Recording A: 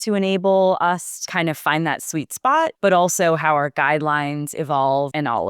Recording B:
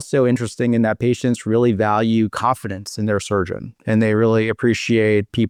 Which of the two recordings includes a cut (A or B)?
A